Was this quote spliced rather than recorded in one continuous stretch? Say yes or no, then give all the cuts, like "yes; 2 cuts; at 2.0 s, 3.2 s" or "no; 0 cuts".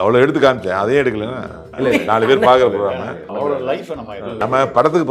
yes; 3 cuts; at 1.7 s, 3.3 s, 4.4 s